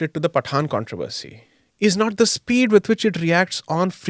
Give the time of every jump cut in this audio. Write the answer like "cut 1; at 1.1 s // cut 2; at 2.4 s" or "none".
none